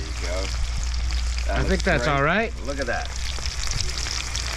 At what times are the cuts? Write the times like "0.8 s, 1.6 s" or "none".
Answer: none